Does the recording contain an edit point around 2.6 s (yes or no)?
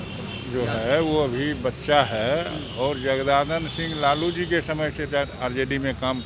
no